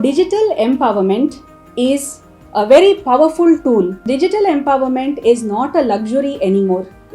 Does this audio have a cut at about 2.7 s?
no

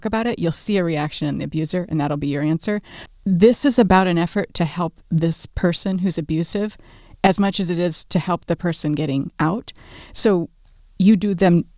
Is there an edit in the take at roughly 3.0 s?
yes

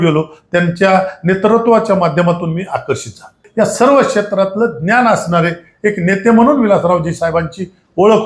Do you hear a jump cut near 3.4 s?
yes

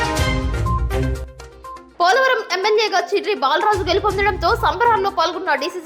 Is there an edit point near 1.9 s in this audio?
yes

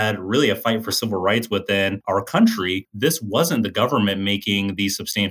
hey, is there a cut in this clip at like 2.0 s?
yes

